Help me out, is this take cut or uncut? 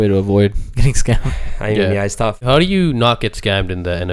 cut